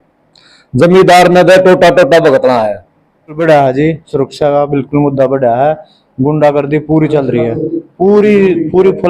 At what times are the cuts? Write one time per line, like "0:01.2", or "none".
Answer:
0:03.4